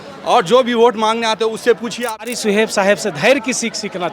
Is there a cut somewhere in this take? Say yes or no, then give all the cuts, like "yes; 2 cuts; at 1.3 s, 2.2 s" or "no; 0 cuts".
yes; 1 cut; at 2.3 s